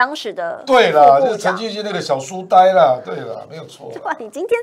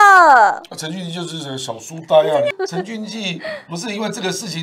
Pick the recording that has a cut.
second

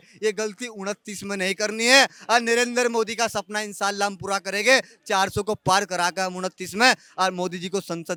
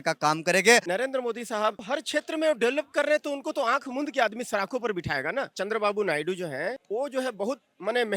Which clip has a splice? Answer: second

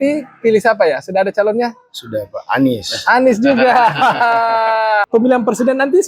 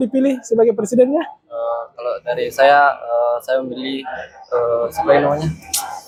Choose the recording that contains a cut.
first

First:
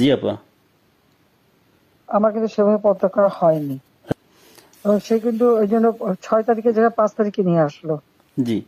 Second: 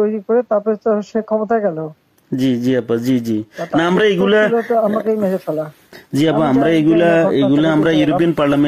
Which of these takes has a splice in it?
first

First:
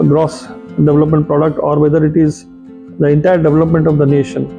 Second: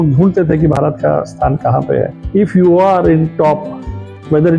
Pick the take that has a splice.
second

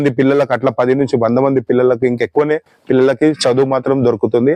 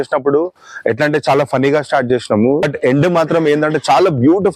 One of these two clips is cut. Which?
second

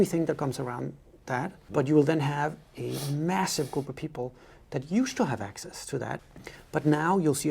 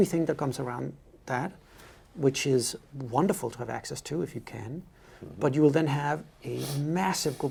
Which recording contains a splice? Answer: first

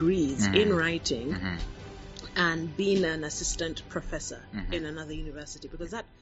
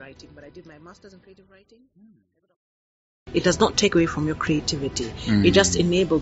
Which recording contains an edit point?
second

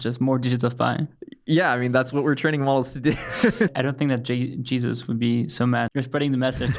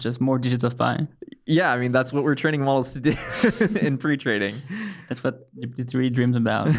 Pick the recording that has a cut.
first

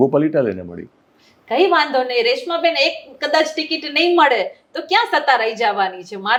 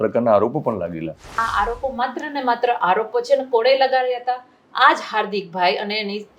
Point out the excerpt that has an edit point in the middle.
second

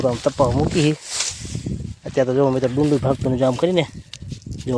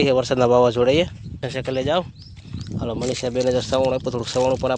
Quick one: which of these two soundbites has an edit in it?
second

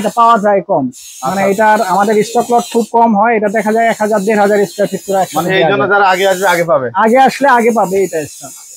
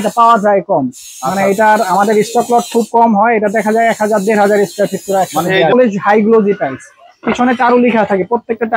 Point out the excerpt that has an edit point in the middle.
second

